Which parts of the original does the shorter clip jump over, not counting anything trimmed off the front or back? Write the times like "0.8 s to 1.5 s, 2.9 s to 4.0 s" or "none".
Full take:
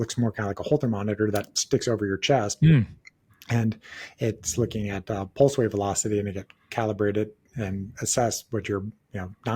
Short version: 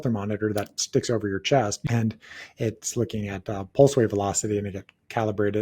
2.5 s to 3.4 s